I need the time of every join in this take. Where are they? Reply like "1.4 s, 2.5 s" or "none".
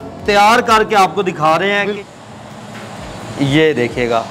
2.0 s